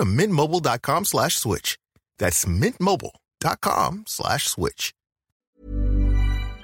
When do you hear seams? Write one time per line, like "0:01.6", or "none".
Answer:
0:05.4